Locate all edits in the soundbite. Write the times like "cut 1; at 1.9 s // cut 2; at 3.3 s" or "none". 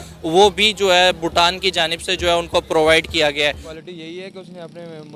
cut 1; at 3.7 s